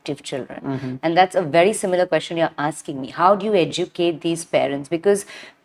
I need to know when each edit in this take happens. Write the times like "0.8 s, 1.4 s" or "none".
none